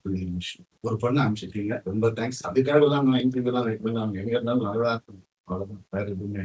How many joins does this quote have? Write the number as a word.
zero